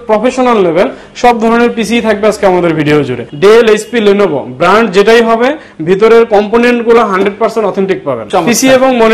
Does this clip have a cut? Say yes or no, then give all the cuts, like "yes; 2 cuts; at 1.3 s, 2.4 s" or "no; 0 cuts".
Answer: yes; 2 cuts; at 3.2 s, 8.2 s